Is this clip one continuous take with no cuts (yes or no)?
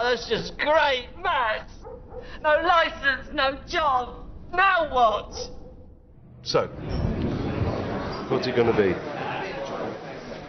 no